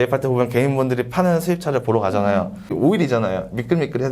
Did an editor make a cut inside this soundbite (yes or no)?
yes